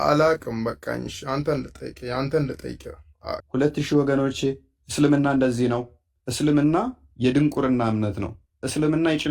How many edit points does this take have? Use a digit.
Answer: 1